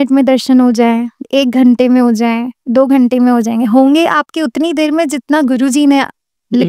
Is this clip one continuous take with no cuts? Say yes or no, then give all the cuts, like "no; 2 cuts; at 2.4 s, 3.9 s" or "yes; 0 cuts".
yes; 0 cuts